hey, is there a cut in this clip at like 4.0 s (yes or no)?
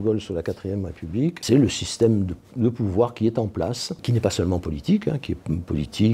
yes